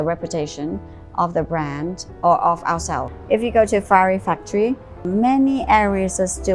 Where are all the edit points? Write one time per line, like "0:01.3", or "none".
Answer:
0:03.1
0:05.1